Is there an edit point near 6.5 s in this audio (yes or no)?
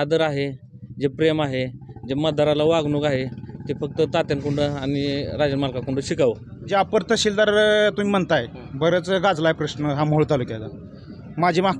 yes